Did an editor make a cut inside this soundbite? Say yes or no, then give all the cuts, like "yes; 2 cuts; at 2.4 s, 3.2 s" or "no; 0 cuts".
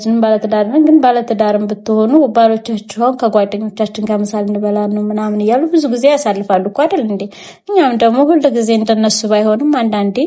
no; 0 cuts